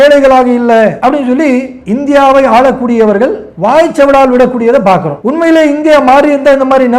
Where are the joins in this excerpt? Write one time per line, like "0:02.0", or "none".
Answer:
0:03.5
0:05.2